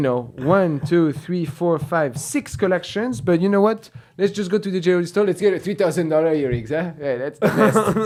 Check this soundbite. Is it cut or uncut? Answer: uncut